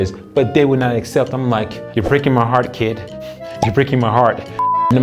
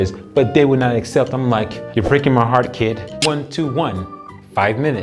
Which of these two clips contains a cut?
second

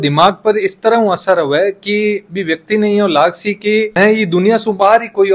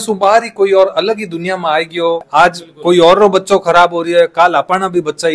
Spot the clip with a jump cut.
second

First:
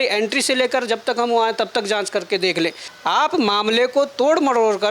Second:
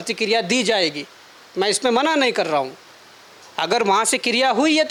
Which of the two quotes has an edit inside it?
first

